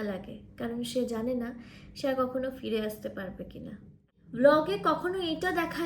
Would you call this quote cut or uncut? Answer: cut